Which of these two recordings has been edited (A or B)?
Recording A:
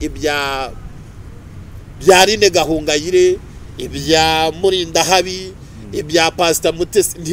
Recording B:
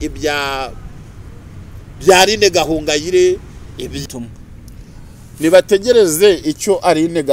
B